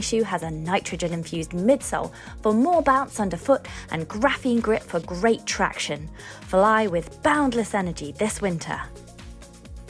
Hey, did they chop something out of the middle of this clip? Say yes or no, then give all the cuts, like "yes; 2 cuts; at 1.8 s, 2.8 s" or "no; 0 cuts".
yes; 1 cut; at 8.9 s